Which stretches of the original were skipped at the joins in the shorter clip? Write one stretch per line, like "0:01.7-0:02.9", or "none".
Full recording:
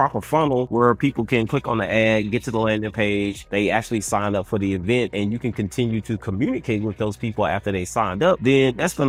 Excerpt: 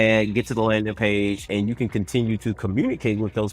0:03.4-0:05.1